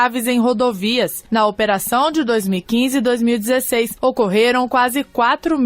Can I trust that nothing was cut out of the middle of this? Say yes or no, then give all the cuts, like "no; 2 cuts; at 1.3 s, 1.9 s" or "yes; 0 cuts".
no; 2 cuts; at 1.2 s, 3.9 s